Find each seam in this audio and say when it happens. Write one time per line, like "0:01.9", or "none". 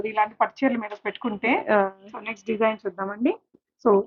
none